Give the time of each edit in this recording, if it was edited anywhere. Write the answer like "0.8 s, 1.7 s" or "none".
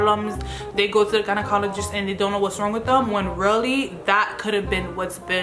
none